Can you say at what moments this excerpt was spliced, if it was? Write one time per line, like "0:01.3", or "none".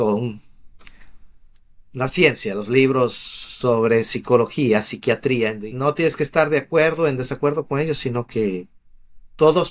0:05.6